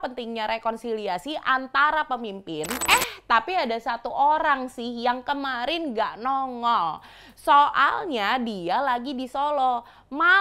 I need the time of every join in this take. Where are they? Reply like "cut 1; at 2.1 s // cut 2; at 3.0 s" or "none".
cut 1; at 2.8 s